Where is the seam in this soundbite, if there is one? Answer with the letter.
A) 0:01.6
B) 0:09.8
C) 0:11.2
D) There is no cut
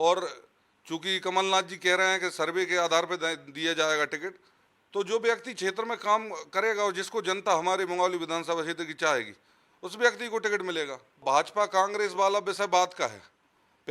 C